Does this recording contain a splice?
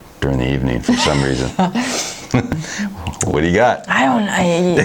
yes; 1 cut; at 2.6 s

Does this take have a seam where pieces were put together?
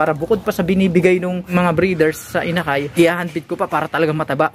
yes; 2 cuts; at 1.5 s, 2.9 s

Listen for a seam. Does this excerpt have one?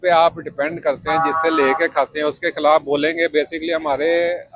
no; 0 cuts

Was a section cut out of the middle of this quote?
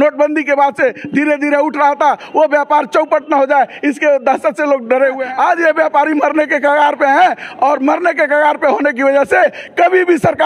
yes; 1 cut; at 5.2 s

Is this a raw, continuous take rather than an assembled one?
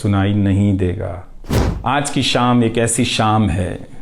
no; 1 cut; at 1.3 s

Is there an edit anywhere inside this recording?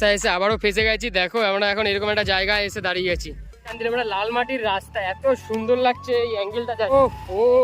yes; 2 cuts; at 3.7 s, 6.9 s

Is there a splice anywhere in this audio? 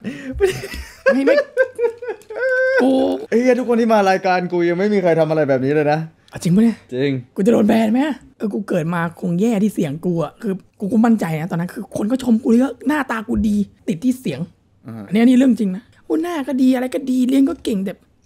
yes; 4 cuts; at 3.2 s, 8.3 s, 13.8 s, 15.9 s

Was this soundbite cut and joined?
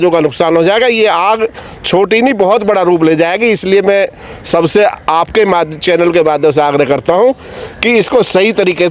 no; 0 cuts

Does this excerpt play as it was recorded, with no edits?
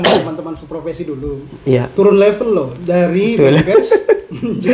yes; 0 cuts

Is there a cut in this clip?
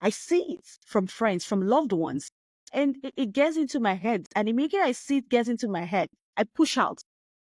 no; 0 cuts

